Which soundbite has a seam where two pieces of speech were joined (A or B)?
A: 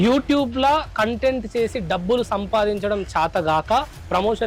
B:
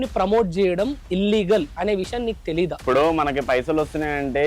B